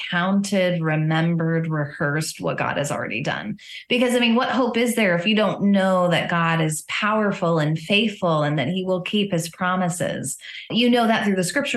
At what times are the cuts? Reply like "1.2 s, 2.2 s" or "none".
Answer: 10.7 s